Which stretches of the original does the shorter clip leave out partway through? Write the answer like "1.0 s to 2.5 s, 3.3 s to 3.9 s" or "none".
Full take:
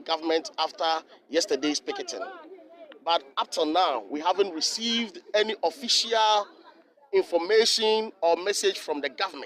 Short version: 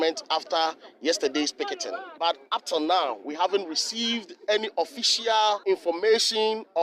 2.3 s to 2.9 s, 6.5 s to 7.1 s